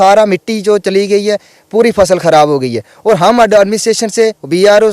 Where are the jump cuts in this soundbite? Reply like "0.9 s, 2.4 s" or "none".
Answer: none